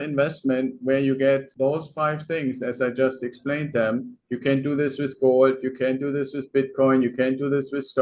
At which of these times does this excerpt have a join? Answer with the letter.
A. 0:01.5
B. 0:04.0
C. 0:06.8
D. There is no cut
A